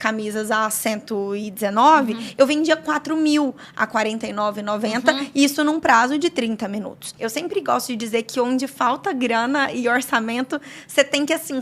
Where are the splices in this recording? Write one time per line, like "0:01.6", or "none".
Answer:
0:07.1